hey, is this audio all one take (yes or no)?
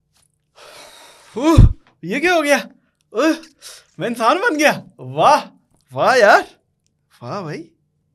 yes